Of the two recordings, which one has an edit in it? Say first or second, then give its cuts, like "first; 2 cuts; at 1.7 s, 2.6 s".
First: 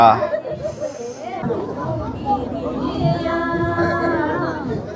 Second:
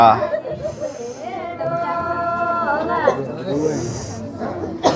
first; 1 cut; at 1.4 s